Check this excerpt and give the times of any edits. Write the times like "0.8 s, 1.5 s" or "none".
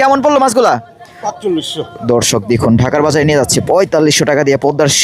none